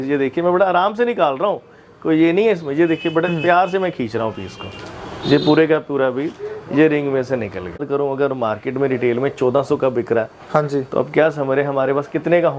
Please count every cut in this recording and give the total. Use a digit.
1